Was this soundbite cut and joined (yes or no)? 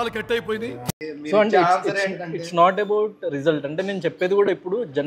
no